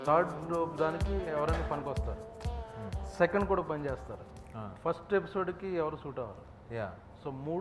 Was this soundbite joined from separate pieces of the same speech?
no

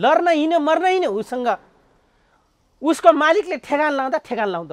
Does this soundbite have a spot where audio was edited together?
no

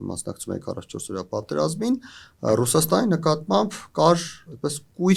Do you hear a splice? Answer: no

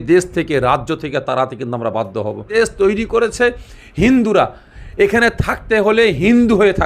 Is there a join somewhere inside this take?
yes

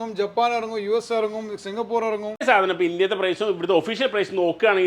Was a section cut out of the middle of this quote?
yes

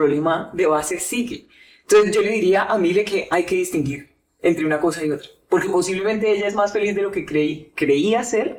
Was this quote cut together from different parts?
no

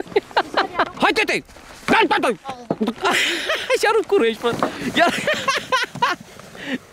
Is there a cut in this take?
yes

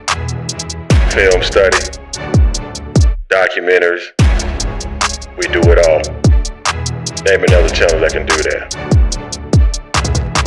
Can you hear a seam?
yes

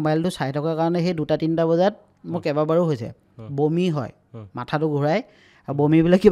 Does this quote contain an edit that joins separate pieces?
no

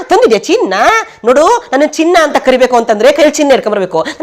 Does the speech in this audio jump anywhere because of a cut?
no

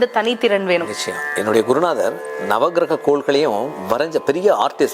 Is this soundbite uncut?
yes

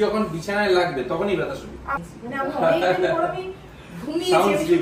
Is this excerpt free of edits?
no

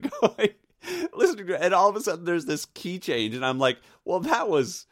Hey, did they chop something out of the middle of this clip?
no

